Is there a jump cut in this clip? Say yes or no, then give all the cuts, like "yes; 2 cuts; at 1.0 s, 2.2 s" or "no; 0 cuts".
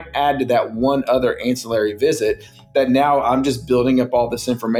no; 0 cuts